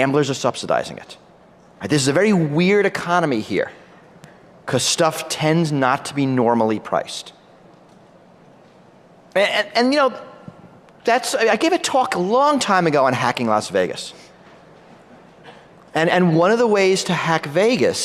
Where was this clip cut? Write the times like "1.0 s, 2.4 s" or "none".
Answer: 3.6 s